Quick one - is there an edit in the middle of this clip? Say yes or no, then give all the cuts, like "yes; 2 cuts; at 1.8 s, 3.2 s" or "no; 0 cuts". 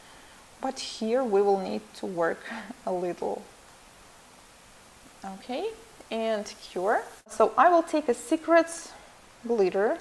yes; 1 cut; at 7.9 s